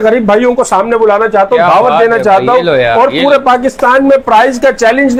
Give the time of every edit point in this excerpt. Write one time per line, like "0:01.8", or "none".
none